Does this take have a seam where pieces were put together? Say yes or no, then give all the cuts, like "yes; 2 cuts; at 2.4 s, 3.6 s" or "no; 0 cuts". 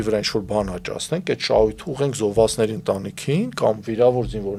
no; 0 cuts